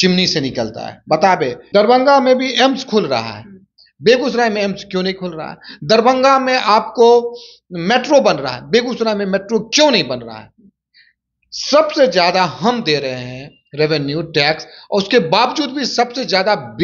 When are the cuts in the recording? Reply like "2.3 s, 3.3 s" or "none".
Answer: 1.6 s